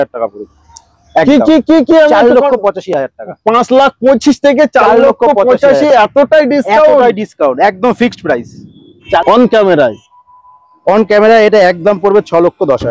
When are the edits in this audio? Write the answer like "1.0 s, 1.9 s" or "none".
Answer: 9.2 s